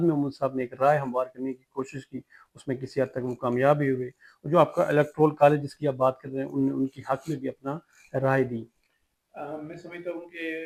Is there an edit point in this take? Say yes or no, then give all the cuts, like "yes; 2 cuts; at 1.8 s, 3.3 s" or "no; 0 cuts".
no; 0 cuts